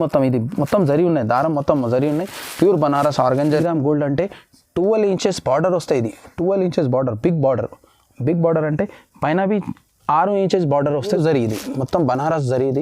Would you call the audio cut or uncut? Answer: cut